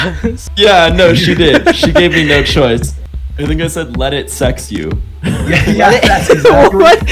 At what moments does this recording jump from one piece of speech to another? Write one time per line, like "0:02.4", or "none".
0:03.0

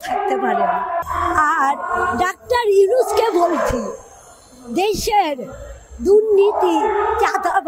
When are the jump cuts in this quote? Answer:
0:01.0

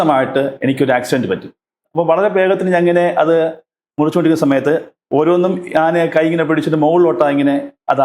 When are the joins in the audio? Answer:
0:01.8

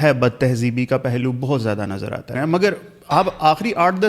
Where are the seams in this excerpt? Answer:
0:02.3

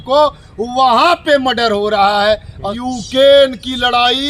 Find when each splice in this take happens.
0:02.7

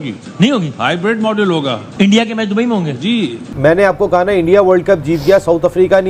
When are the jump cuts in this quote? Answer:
0:03.5

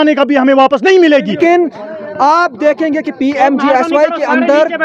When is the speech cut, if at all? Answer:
0:01.4

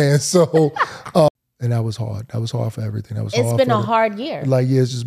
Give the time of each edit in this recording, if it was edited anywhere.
0:01.3

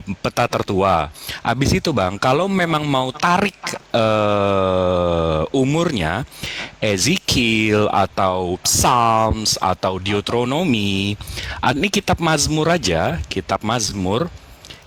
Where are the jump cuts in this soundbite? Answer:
none

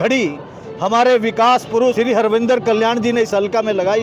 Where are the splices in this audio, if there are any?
0:01.8

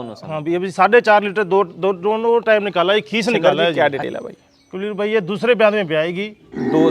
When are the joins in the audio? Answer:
0:03.7

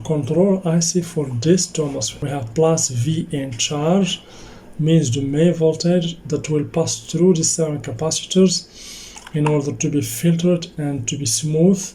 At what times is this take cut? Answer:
0:02.1

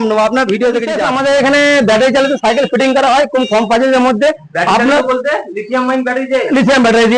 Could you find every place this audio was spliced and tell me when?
0:01.0

